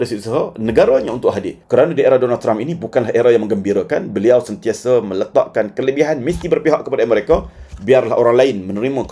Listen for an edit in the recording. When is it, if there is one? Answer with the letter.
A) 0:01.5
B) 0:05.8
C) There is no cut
A